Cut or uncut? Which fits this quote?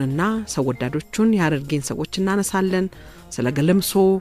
uncut